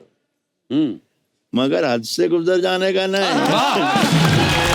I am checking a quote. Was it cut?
no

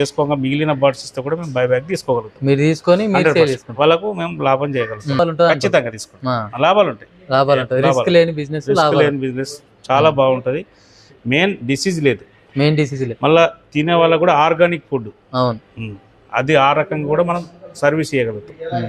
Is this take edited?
no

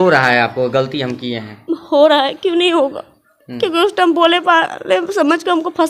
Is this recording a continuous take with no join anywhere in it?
yes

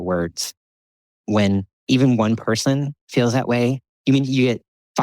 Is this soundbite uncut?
no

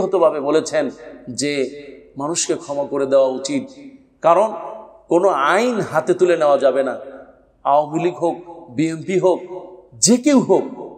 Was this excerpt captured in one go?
yes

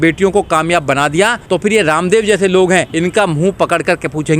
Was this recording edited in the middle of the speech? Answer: yes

